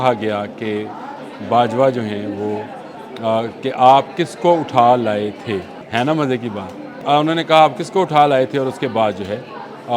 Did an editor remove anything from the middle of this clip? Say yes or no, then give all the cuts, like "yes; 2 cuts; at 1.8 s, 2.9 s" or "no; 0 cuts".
yes; 2 cuts; at 5.8 s, 6.9 s